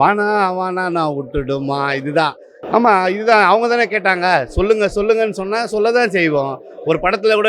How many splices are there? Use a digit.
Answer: 1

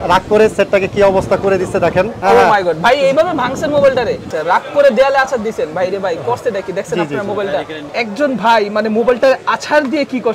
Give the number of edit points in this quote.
3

